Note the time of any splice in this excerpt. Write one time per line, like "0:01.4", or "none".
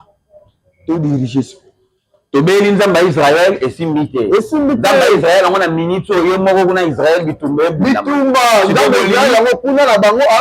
none